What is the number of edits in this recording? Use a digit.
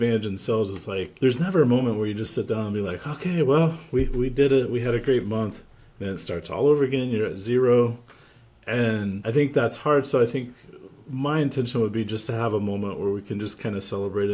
2